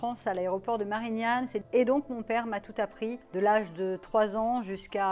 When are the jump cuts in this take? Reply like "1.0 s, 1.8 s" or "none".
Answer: 1.6 s, 3.2 s